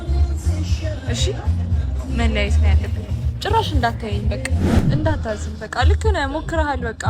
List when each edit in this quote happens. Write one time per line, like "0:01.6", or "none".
0:04.7